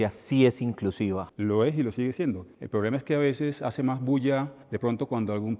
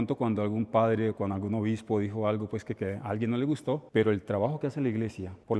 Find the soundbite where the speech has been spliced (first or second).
first